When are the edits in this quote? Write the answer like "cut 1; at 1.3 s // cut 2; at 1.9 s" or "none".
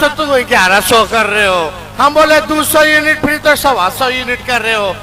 none